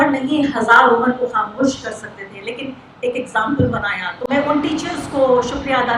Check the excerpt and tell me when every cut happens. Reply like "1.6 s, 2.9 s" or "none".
none